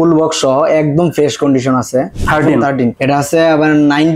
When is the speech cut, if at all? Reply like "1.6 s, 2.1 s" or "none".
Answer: 2.1 s, 3.0 s